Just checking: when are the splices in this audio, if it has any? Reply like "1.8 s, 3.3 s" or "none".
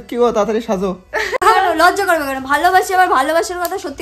1.4 s